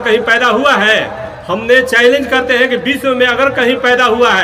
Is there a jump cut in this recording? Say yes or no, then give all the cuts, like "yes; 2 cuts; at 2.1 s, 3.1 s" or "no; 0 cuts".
no; 0 cuts